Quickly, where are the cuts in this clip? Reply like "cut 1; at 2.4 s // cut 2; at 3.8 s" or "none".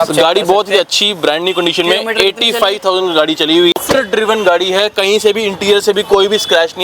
none